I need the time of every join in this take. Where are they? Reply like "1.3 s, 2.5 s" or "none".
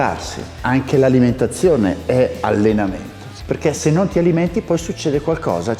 3.4 s